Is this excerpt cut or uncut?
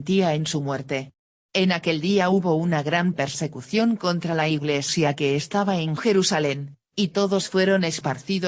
cut